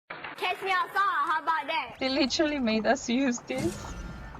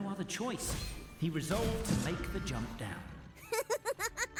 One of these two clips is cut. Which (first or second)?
first